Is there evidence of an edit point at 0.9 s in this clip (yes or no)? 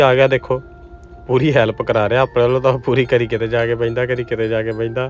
no